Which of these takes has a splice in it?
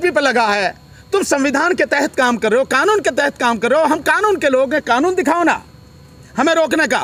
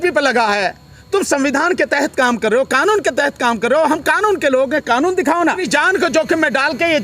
second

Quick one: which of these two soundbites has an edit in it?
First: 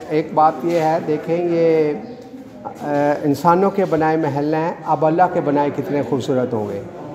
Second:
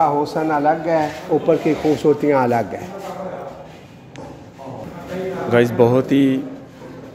second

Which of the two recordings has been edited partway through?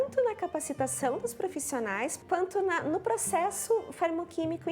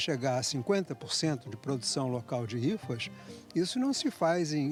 first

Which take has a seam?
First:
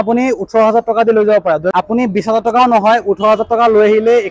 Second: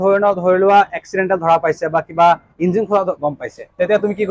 first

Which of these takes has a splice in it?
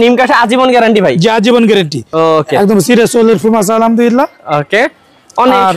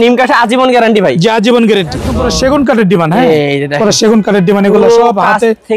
second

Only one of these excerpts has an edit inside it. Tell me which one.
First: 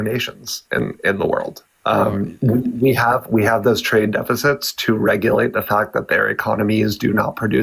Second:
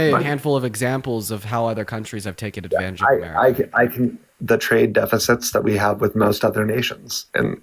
second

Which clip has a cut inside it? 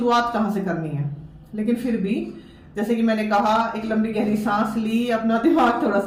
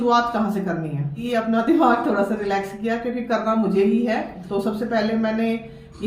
second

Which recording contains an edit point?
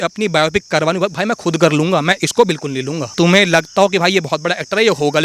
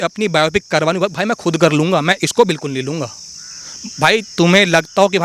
first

